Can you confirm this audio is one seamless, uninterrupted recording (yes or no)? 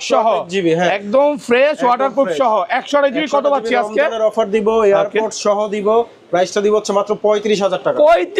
yes